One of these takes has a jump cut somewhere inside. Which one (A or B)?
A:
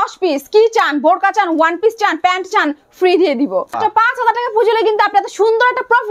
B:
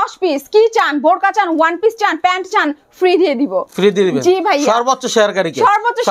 A